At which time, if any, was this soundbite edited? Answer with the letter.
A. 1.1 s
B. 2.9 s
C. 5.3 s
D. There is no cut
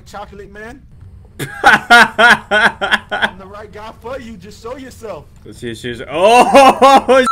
C